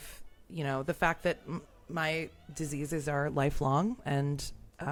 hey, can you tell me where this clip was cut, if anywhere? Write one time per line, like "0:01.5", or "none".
none

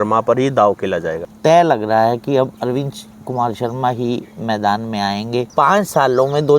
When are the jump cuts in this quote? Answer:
0:01.3
0:05.5

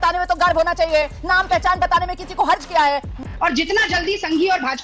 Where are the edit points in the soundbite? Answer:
0:03.3

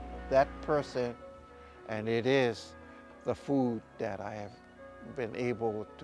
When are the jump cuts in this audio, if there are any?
0:01.2

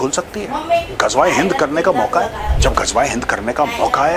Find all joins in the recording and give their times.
0:02.5

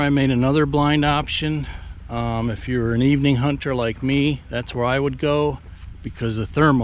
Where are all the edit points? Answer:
none

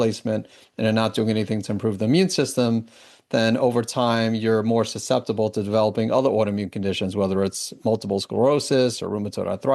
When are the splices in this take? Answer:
none

